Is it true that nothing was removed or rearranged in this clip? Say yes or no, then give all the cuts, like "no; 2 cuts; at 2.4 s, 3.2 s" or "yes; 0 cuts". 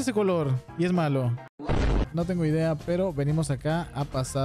no; 1 cut; at 2.1 s